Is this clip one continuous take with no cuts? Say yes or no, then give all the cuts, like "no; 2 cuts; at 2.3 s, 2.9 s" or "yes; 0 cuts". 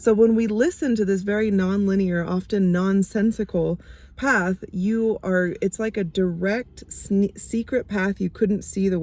yes; 0 cuts